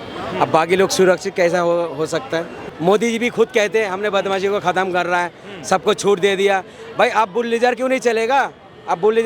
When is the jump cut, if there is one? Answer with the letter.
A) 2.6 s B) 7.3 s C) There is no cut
A